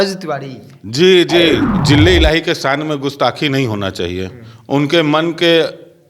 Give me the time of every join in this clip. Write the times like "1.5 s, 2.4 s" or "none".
1.7 s